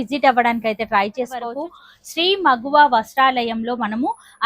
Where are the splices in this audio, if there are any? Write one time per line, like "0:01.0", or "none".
0:01.5